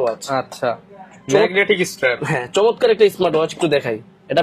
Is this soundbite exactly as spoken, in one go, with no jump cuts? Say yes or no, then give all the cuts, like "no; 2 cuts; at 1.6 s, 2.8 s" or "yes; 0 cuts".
yes; 0 cuts